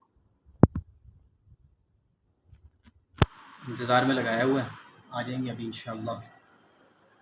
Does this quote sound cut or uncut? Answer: uncut